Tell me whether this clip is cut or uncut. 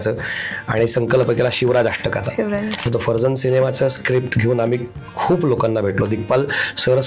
cut